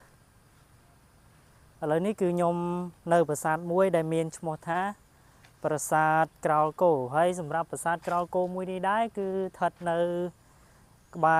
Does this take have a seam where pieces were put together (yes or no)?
no